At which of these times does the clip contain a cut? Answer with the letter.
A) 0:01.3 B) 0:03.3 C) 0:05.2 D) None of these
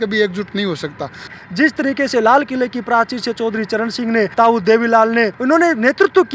A